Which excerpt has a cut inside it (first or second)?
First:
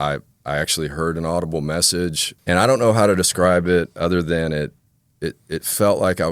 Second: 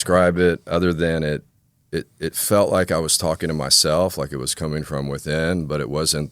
first